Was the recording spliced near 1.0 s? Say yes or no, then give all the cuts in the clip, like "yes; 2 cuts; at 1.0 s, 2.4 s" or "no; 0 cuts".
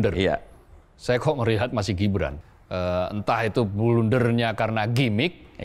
no; 1 cut; at 2.4 s